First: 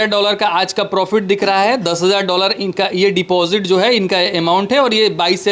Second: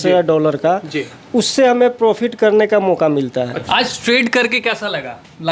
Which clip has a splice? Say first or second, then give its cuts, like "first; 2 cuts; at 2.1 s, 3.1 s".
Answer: second; 1 cut; at 3.6 s